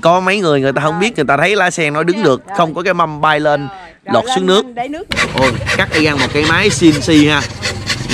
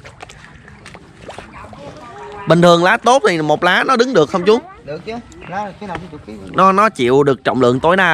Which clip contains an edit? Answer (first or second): first